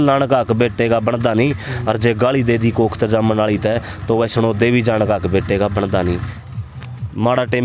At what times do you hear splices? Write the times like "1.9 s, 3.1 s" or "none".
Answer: 6.3 s